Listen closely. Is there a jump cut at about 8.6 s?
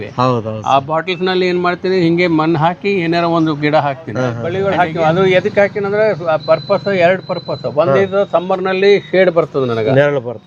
no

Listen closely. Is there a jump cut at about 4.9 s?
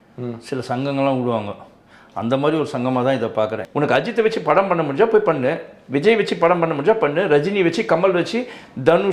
no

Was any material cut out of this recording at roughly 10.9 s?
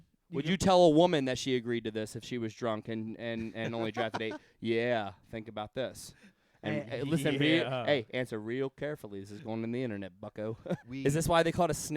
yes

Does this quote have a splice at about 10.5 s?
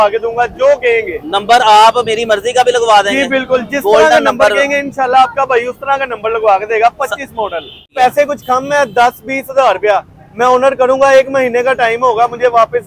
no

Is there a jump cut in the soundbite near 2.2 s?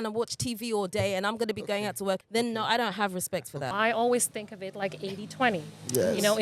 yes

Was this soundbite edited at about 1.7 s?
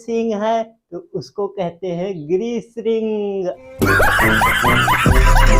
no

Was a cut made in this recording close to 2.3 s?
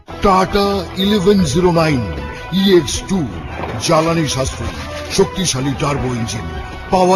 no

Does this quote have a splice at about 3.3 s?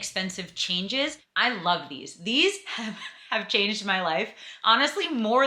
no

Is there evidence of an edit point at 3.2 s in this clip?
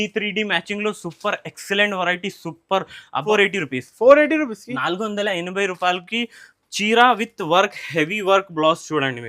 yes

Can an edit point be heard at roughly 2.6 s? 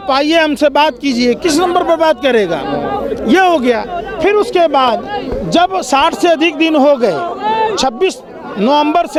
no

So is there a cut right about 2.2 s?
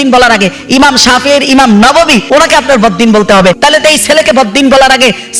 yes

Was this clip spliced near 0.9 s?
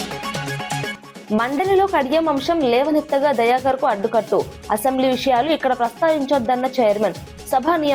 yes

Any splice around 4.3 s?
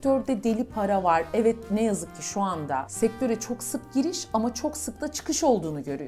no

